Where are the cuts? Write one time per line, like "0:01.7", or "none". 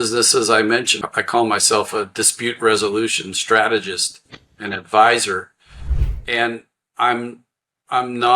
0:00.9